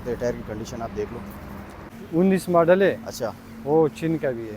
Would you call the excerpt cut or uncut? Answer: cut